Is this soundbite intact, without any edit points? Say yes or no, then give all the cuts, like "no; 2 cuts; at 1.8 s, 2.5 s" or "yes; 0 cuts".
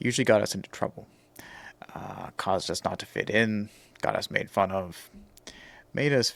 yes; 0 cuts